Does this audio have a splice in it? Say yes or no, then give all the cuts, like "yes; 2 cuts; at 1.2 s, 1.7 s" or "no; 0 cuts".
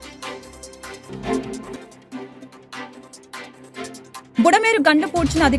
yes; 2 cuts; at 1.1 s, 4.3 s